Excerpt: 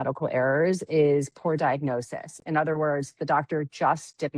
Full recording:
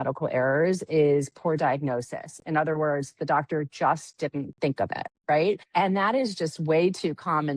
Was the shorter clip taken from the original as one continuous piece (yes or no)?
yes